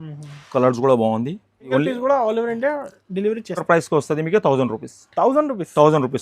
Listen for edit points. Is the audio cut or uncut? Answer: cut